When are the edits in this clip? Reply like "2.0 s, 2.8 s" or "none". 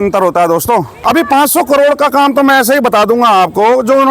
0.9 s